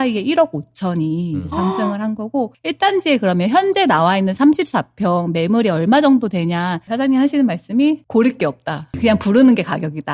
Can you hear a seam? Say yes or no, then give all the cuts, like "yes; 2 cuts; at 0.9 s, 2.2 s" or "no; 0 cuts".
yes; 4 cuts; at 2.6 s, 6.9 s, 8.0 s, 9.0 s